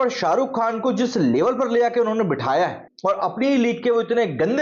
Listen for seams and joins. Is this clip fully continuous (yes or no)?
no